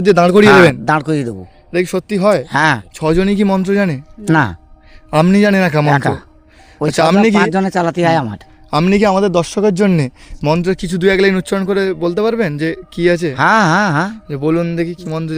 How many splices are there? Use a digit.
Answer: 1